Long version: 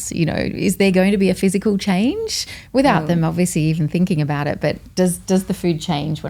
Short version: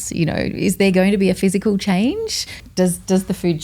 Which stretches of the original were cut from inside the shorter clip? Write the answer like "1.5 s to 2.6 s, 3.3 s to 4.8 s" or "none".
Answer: 2.6 s to 4.8 s